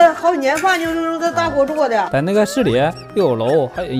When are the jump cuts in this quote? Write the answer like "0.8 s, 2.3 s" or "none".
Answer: 2.1 s

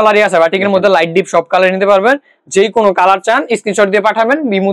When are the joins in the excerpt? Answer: none

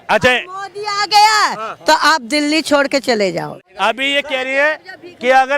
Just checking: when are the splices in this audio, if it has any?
3.6 s

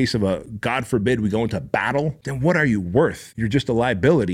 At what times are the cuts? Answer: 2.2 s, 3.3 s

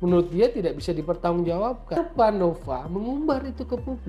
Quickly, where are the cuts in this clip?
2.0 s

